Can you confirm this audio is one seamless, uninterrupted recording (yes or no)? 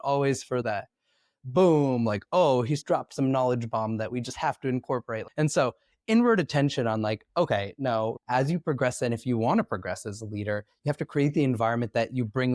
no